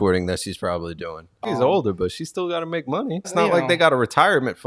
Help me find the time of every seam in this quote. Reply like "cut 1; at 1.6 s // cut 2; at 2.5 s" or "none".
cut 1; at 1.4 s // cut 2; at 3.3 s